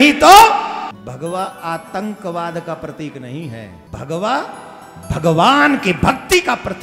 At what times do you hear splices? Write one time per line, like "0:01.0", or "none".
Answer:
0:01.0
0:03.8